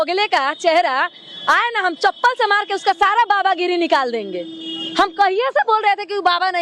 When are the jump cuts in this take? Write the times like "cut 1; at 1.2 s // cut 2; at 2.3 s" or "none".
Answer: none

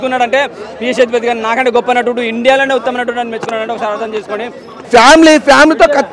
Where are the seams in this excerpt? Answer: cut 1; at 4.7 s

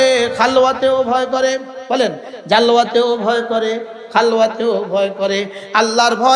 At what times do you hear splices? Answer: none

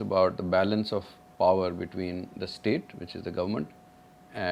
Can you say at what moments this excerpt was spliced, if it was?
none

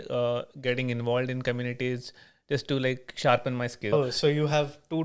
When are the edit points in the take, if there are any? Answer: cut 1; at 3.9 s

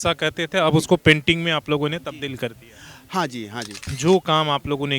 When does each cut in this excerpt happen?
cut 1; at 3.9 s

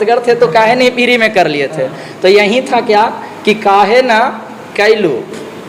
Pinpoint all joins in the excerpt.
none

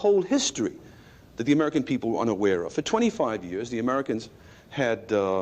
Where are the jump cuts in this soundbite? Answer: cut 1; at 2.3 s

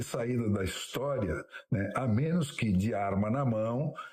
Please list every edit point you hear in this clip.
none

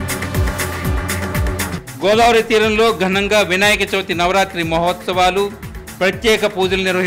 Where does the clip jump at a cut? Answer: cut 1; at 1.7 s

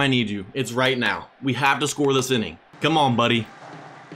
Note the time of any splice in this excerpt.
cut 1; at 2.7 s

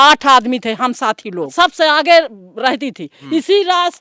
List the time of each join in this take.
cut 1; at 1.5 s // cut 2; at 3.1 s

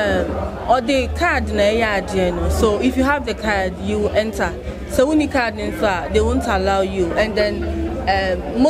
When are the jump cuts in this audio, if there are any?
none

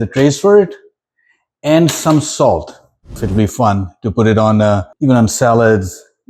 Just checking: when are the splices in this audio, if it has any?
cut 1; at 3.2 s // cut 2; at 4.9 s

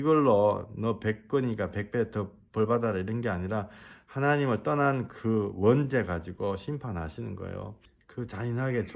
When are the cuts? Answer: cut 1; at 7.7 s

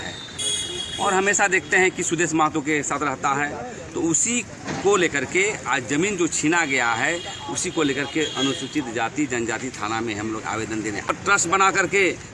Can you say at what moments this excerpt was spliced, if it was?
cut 1; at 11.1 s

